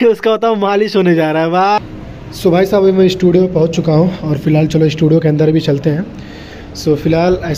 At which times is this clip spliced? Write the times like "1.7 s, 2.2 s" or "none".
1.8 s